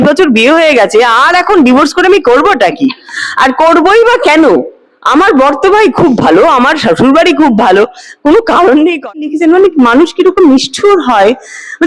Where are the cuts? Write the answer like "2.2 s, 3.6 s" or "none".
9.3 s